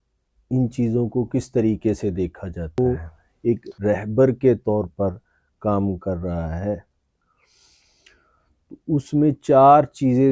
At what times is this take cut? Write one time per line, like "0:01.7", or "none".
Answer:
0:02.8

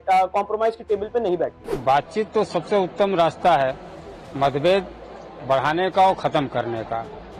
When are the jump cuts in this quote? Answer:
0:01.7

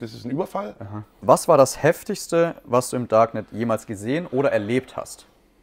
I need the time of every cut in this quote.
0:01.2

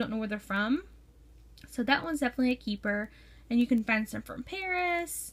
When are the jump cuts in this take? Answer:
0:02.2

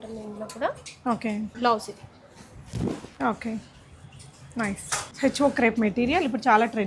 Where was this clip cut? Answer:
0:01.5
0:05.1

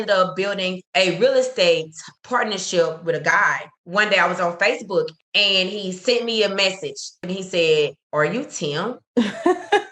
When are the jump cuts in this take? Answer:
0:09.0

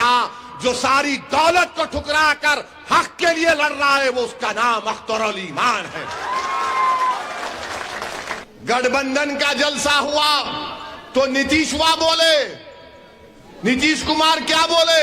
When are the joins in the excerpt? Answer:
0:08.5

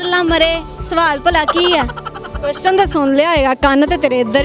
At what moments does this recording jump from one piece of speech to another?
0:02.1

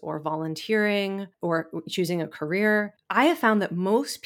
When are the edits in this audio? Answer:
0:01.3
0:03.0

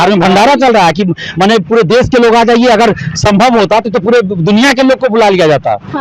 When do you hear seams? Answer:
none

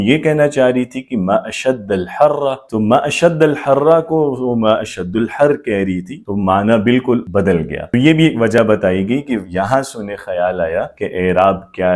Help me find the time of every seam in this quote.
none

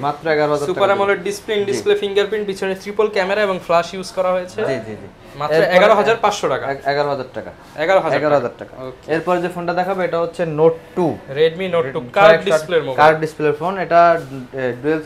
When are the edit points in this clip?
none

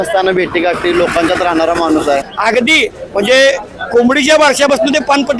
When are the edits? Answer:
0:02.3
0:03.7

